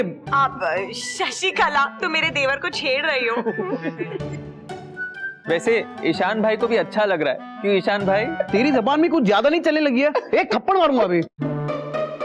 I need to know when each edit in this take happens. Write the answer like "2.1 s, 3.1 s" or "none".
none